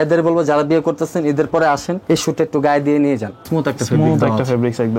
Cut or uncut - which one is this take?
cut